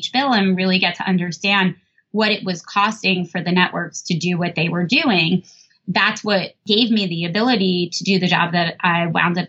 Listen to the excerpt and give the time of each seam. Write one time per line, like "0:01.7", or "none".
none

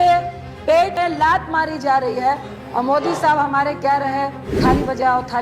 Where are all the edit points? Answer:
0:00.9
0:02.5
0:04.4

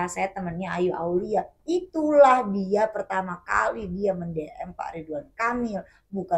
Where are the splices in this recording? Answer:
none

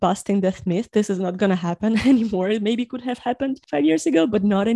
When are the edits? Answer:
none

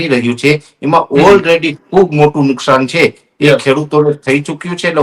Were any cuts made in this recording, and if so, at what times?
none

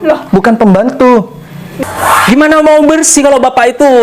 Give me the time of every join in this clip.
0:01.7

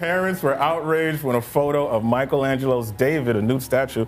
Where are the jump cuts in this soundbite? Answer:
none

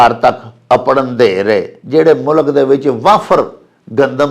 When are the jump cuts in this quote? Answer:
0:01.8

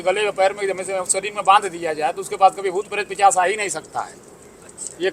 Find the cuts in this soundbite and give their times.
none

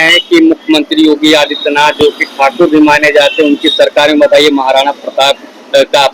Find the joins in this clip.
none

